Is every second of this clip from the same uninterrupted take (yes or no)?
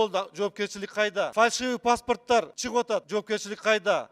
no